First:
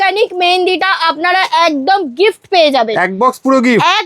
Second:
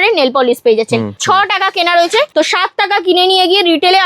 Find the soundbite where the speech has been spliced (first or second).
second